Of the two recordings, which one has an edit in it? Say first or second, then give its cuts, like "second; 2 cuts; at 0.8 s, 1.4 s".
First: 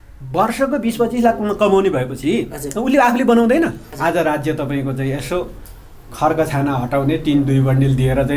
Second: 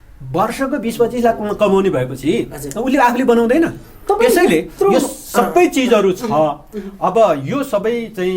first; 1 cut; at 3.9 s